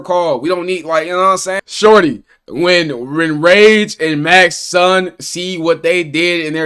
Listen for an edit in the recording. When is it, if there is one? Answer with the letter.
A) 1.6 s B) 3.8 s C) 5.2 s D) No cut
A